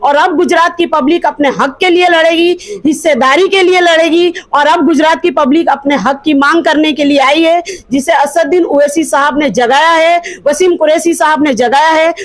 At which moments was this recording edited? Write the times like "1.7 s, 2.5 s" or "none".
none